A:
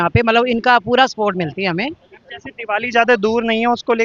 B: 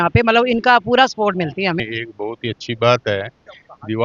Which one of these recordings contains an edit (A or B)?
B